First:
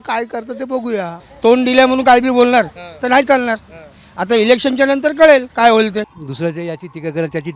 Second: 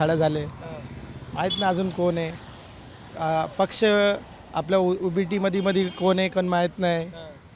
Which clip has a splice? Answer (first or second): first